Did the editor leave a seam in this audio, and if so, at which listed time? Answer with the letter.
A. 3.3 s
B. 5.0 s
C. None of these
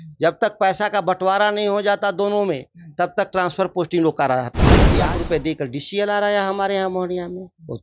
B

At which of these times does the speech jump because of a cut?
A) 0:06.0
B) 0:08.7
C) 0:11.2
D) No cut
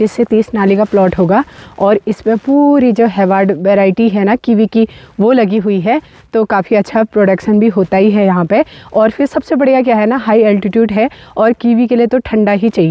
D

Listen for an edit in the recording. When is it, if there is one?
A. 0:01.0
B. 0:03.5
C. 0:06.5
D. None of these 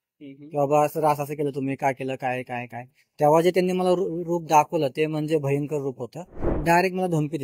C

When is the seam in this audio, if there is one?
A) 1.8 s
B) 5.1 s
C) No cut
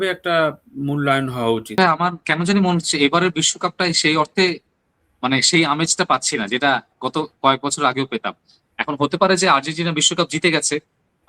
A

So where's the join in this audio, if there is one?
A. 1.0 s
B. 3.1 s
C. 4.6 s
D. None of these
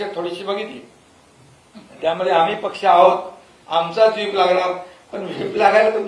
D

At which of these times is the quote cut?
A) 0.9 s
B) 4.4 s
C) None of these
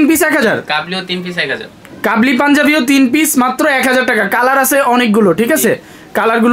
C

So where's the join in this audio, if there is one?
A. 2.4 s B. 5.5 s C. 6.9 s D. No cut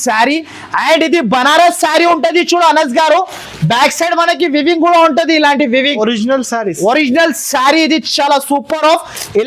D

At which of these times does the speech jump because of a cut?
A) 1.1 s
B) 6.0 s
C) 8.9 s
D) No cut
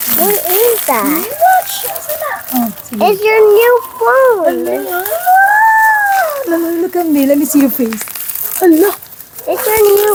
D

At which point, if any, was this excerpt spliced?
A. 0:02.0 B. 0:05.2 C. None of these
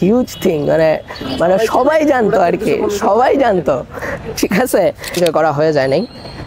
B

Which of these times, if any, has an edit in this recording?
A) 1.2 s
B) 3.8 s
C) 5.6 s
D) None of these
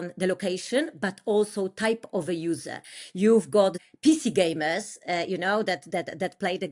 B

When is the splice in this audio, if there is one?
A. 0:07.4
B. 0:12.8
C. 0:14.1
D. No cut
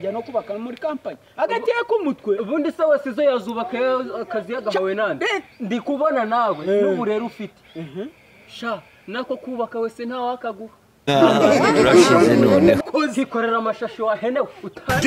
B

